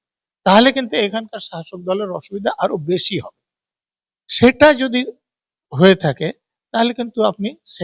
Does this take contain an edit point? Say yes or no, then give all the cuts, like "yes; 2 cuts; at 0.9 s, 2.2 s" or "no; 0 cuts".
no; 0 cuts